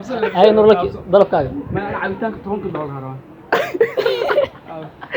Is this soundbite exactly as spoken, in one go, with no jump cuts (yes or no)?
yes